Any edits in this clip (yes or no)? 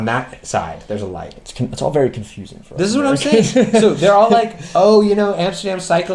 no